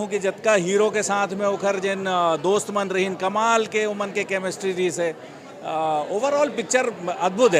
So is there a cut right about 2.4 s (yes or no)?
no